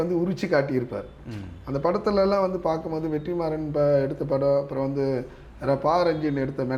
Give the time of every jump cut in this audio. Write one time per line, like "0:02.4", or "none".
none